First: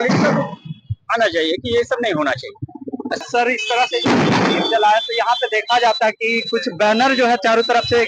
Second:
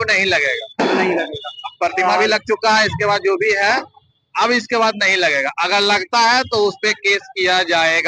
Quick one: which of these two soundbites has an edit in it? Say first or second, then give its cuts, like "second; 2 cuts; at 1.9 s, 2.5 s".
first; 1 cut; at 3.2 s